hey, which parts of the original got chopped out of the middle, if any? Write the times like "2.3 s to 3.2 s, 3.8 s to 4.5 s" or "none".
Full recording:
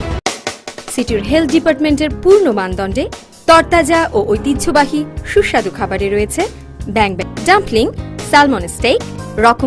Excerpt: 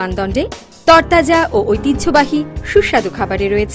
none